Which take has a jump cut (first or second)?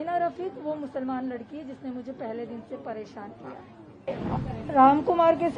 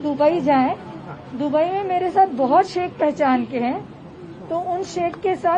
first